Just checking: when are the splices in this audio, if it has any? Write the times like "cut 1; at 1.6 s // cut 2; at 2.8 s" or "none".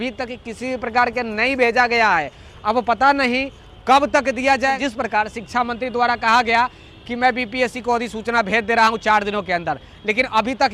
cut 1; at 4.8 s